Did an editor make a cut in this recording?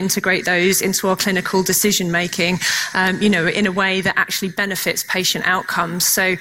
no; 0 cuts

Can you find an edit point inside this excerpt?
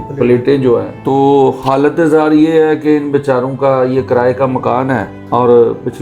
yes; 2 cuts; at 0.9 s, 5.1 s

